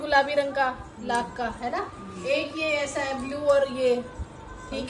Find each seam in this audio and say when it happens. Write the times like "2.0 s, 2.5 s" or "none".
none